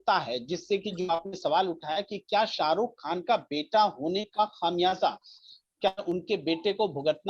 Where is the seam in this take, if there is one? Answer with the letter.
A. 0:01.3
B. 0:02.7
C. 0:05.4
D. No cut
C